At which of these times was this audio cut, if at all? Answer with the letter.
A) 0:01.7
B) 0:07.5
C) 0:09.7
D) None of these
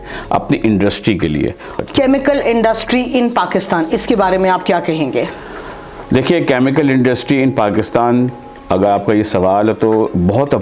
A